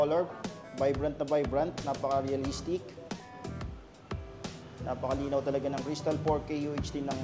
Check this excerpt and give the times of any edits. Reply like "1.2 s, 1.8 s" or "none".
none